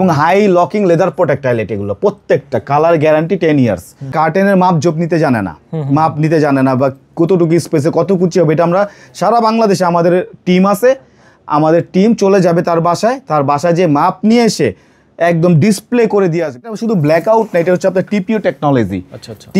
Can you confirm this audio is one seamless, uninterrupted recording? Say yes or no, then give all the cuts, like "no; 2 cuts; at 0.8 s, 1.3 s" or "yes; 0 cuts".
no; 2 cuts; at 4.1 s, 16.7 s